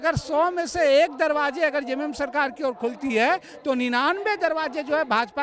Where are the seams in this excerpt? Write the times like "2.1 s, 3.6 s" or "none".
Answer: none